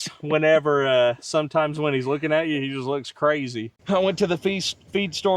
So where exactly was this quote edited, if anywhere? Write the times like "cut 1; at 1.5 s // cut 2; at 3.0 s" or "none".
cut 1; at 3.7 s